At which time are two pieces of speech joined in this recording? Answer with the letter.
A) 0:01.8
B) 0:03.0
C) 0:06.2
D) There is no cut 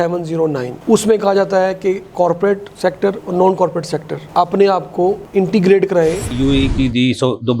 C